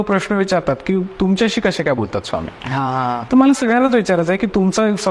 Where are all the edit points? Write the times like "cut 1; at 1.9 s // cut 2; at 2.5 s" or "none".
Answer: none